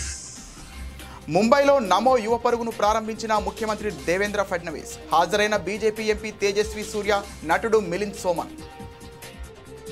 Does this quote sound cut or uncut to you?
cut